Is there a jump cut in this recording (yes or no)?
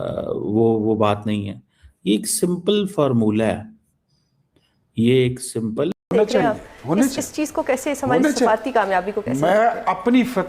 yes